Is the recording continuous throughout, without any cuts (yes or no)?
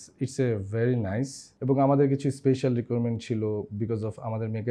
no